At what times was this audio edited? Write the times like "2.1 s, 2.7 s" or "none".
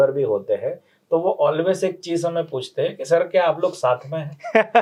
none